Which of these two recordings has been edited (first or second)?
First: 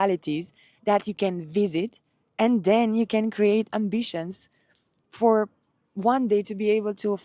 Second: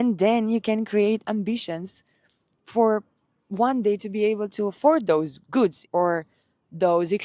second